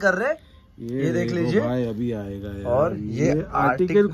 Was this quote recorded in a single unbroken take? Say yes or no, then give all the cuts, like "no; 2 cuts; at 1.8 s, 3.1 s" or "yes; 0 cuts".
yes; 0 cuts